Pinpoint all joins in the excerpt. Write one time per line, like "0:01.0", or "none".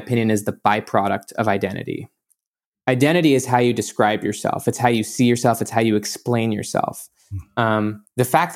0:02.4